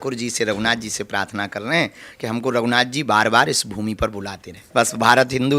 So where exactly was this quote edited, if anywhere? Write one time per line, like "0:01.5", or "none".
0:04.5